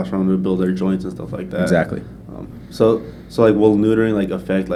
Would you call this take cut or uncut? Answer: uncut